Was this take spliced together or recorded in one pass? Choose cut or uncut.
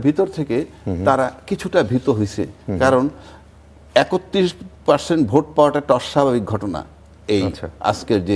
uncut